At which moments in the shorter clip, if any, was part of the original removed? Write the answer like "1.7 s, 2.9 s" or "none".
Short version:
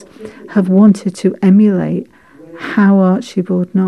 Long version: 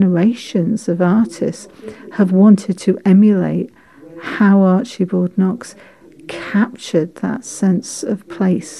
none

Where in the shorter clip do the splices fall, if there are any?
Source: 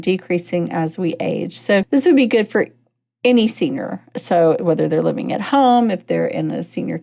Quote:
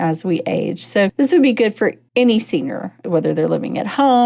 2.0 s, 3.1 s

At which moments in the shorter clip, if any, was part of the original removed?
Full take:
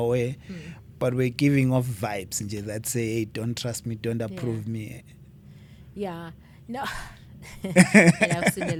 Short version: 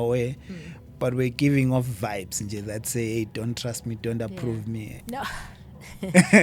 4.9 s

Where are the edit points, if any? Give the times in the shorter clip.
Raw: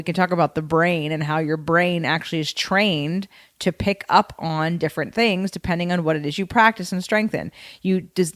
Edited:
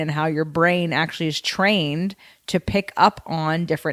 none

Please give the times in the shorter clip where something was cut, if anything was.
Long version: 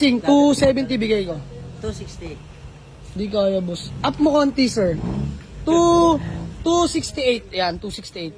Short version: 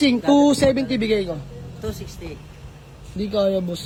none

